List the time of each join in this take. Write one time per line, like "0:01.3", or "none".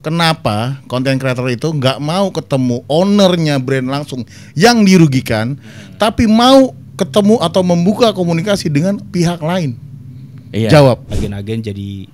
0:11.1